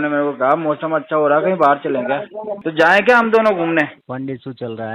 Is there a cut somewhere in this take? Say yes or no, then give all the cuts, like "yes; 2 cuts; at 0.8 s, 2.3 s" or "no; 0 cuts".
yes; 2 cuts; at 2.6 s, 4.0 s